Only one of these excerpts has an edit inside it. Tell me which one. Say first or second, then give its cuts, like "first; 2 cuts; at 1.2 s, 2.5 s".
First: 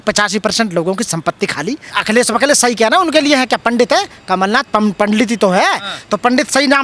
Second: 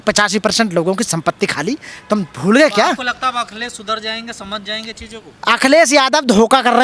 first; 1 cut; at 1.9 s